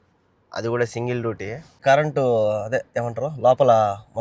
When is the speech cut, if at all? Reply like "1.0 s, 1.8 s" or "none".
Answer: 1.8 s